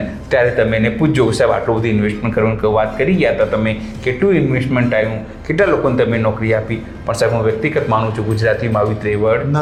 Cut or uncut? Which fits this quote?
uncut